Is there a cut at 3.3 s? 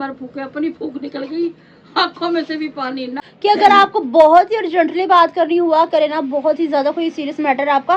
yes; 2 cuts; at 1.6 s, 3.3 s

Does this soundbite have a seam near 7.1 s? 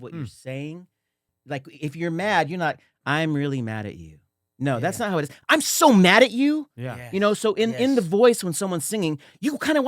no; 1 cut; at 1.3 s

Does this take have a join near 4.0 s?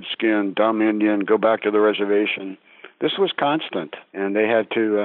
yes; 1 cut; at 4.0 s

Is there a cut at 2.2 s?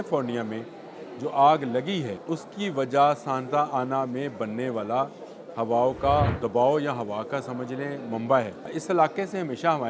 yes; 3 cuts; at 2.2 s, 6.4 s, 8.8 s

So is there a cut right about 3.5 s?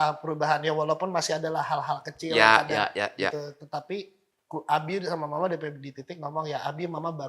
no; 0 cuts

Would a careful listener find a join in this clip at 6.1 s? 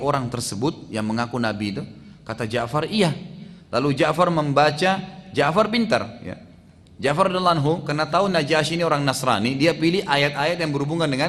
no; 0 cuts

